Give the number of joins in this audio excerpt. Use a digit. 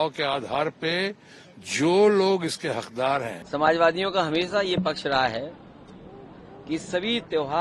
1